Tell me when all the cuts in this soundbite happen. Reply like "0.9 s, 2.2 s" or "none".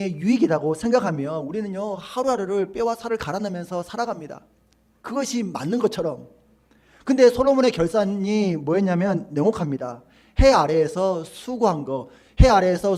none